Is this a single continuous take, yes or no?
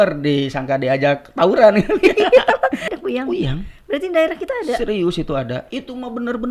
no